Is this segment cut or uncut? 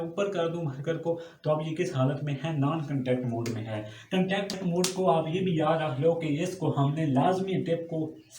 cut